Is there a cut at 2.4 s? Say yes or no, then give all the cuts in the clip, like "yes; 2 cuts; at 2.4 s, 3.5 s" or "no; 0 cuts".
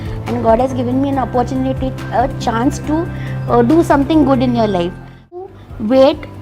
no; 1 cut; at 5.5 s